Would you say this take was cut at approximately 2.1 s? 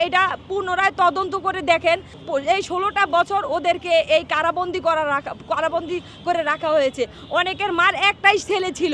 yes; 1 cut; at 2.1 s

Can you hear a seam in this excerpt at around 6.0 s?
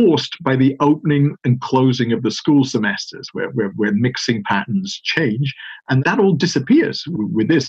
yes; 1 cut; at 6.0 s

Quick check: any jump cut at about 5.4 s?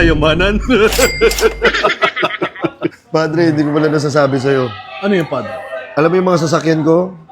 no; 1 cut; at 3.0 s

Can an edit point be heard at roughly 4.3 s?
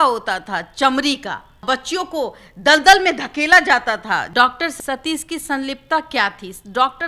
yes; 2 cuts; at 1.6 s, 4.3 s

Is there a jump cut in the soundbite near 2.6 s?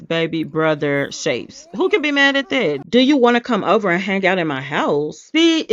yes; 1 cut; at 2.6 s

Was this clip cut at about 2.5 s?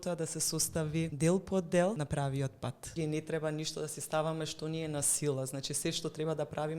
yes; 2 cuts; at 1.1 s, 2.5 s

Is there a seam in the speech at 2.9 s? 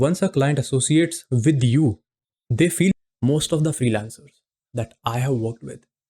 yes; 1 cut; at 2.9 s

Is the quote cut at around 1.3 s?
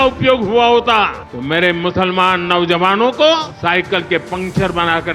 yes; 2 cuts; at 1.3 s, 3.5 s

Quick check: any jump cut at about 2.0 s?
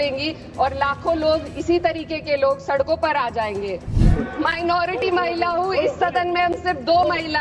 no; 1 cut; at 4.0 s

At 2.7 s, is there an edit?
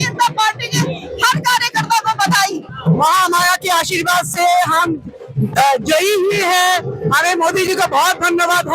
yes; 1 cut; at 2.7 s

